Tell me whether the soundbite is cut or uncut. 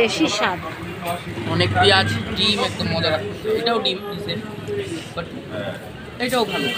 cut